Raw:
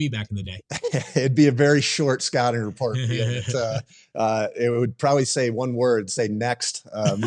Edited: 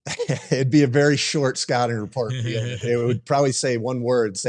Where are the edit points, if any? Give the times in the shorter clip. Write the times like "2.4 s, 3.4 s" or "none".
2.8 s